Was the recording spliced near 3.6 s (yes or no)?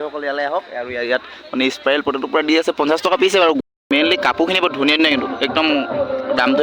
yes